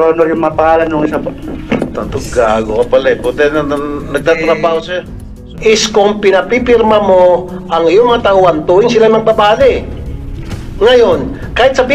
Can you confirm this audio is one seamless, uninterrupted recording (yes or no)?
no